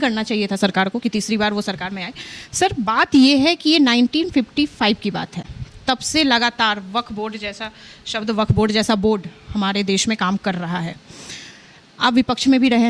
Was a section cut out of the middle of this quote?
no; 0 cuts

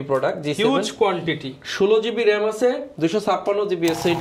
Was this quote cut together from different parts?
no; 0 cuts

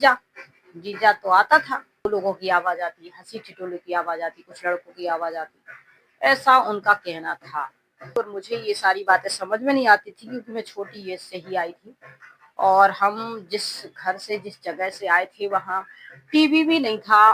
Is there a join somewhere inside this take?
yes; 2 cuts; at 2.0 s, 8.2 s

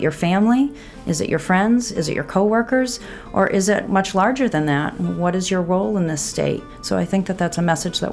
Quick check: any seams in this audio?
yes; 2 cuts; at 3.9 s, 6.7 s

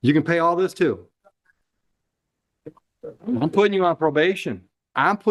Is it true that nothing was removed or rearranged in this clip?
yes; 0 cuts

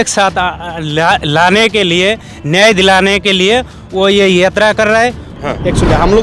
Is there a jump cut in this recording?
yes; 1 cut; at 5.3 s

